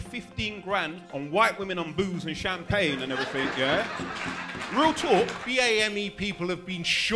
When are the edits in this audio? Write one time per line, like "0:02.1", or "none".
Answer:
0:01.0
0:05.4